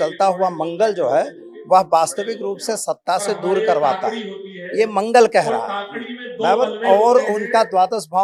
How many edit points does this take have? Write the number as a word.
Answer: zero